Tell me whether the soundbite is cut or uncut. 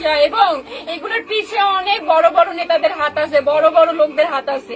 uncut